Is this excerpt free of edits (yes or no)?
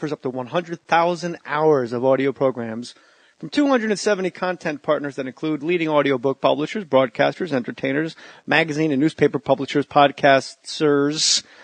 no